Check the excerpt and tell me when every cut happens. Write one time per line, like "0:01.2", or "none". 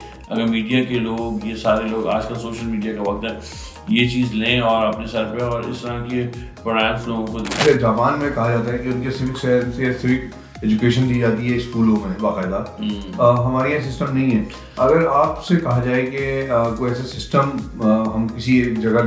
0:07.6

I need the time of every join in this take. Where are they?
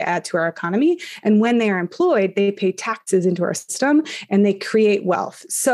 none

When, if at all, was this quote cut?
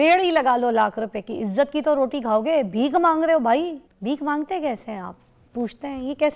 0:03.9

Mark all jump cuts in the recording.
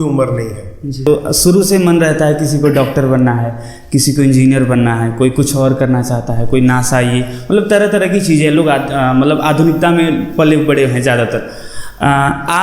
0:01.0

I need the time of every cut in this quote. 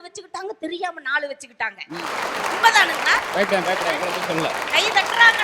none

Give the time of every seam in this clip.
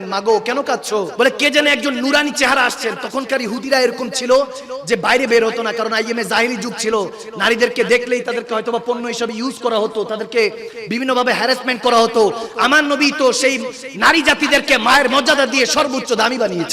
0:01.1

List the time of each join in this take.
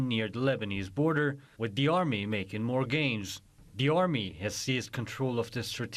0:03.7

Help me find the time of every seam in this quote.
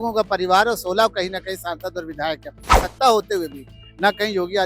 0:02.7

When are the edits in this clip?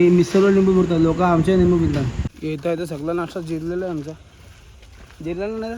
0:02.5

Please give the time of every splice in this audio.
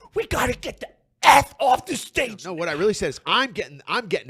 0:02.4

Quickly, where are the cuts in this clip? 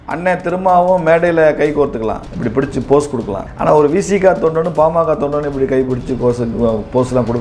0:02.3
0:03.4

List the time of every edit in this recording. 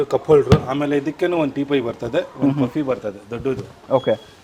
none

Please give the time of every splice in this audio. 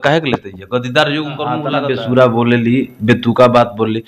0:01.6

